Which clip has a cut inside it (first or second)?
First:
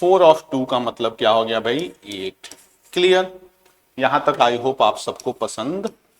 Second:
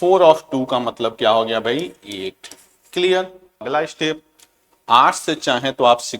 second